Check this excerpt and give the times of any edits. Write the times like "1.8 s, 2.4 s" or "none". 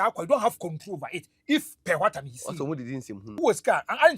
3.2 s